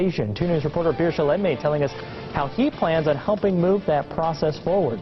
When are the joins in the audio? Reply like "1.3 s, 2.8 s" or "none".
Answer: 1.2 s, 3.8 s